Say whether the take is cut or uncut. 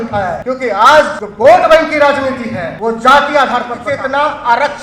cut